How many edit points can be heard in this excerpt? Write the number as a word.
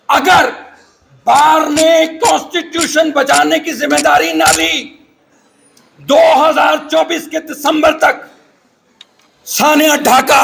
zero